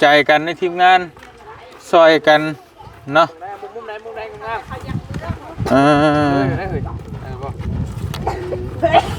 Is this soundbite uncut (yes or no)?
yes